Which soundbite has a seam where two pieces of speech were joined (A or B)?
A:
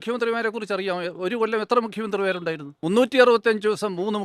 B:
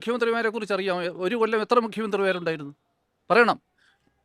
A